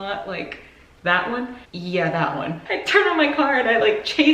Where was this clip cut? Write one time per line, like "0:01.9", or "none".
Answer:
0:01.6
0:02.6